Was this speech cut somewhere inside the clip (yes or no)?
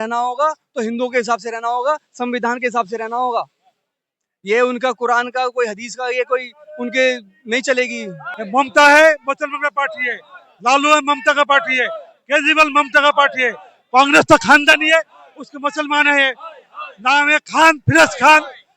yes